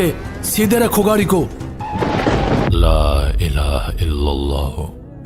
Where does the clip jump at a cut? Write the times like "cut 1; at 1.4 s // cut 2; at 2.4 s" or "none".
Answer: cut 1; at 2.7 s